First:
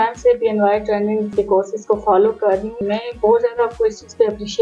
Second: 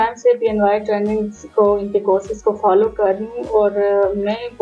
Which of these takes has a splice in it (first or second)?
first